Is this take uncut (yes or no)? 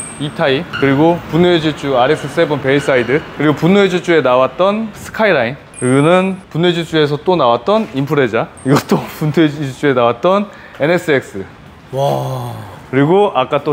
yes